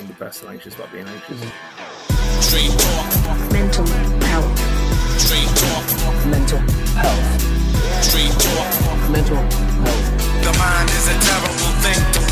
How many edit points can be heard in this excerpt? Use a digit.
1